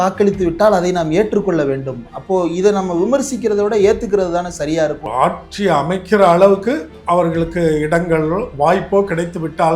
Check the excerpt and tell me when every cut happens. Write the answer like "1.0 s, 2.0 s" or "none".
5.0 s